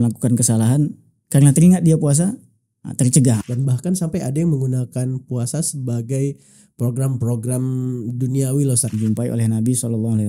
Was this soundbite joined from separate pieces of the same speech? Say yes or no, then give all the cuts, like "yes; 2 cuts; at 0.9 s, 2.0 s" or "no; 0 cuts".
yes; 2 cuts; at 3.4 s, 8.9 s